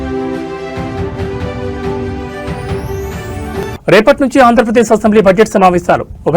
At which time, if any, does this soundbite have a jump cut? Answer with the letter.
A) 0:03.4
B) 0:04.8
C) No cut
A